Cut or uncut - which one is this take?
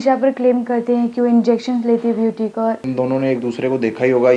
cut